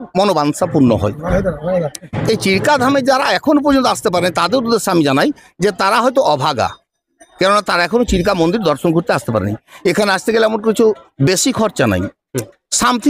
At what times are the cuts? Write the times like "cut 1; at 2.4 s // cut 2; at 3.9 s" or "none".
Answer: none